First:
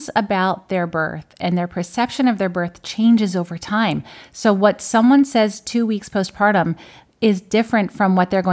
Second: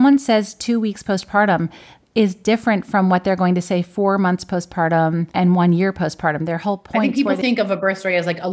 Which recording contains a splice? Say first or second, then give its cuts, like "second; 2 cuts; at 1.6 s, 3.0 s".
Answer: second; 2 cuts; at 5.3 s, 7.0 s